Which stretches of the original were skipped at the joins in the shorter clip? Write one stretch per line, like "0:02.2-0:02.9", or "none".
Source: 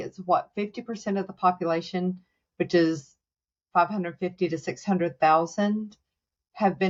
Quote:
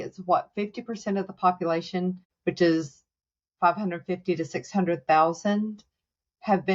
0:02.3-0:02.4